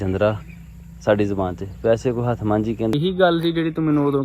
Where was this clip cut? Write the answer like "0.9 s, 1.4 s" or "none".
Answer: 2.9 s